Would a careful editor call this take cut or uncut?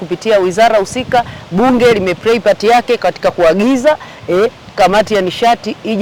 uncut